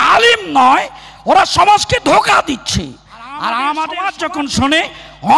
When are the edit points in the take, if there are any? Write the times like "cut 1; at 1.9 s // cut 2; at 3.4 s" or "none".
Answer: cut 1; at 4.1 s